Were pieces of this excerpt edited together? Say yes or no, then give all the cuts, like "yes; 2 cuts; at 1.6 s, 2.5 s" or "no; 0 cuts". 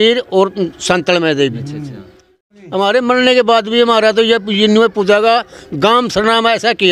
yes; 1 cut; at 2.4 s